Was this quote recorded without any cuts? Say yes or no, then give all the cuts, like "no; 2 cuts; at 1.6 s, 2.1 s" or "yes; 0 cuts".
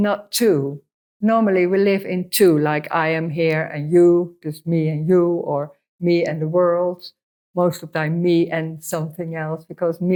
yes; 0 cuts